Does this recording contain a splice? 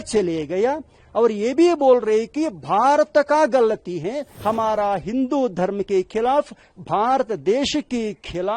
yes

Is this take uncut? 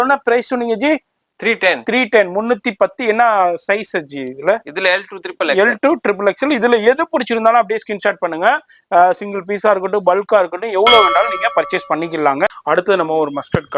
yes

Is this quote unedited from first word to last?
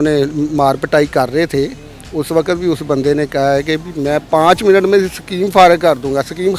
yes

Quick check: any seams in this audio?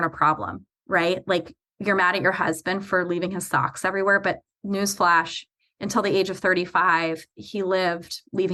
no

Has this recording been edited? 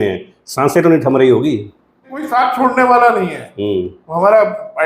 yes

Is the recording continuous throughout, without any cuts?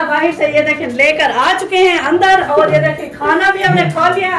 yes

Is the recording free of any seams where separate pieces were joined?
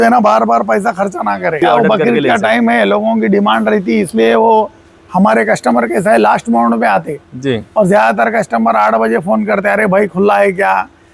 no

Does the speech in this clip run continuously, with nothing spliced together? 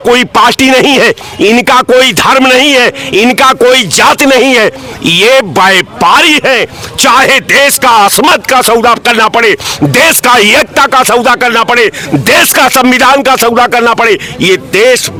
yes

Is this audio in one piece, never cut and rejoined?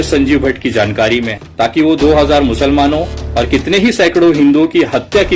no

